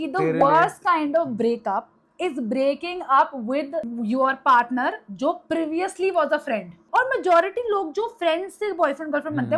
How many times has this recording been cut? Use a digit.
2